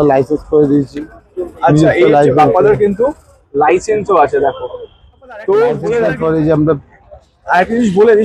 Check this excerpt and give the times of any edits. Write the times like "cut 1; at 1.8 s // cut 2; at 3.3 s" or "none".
cut 1; at 5.8 s